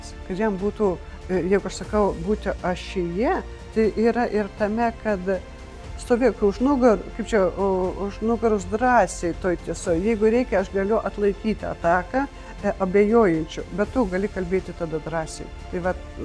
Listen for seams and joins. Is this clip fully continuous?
yes; 0 cuts

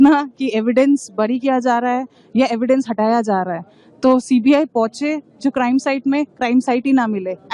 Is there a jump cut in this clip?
no; 0 cuts

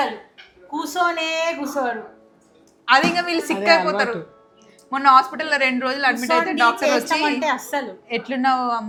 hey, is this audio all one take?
yes; 0 cuts

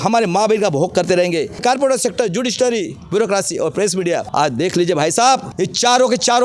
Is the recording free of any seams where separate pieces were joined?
no; 3 cuts; at 1.6 s, 4.3 s, 5.5 s

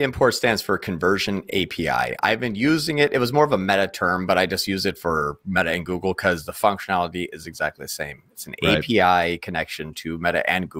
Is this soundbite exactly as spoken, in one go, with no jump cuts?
yes; 0 cuts

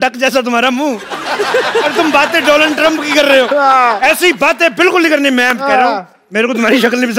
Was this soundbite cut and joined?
no; 0 cuts

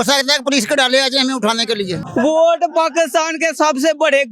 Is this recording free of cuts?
no; 1 cut; at 2.0 s

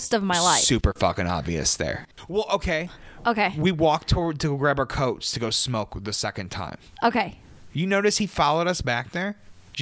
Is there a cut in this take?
no; 0 cuts

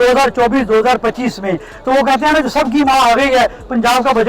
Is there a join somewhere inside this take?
yes; 1 cut; at 2.9 s

